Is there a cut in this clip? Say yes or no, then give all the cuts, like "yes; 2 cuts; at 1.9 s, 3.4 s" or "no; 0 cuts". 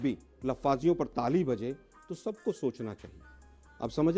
yes; 1 cut; at 3.0 s